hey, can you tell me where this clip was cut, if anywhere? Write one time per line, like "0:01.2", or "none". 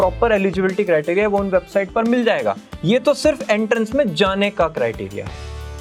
none